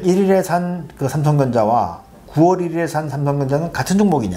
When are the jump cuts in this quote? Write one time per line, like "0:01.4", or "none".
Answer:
none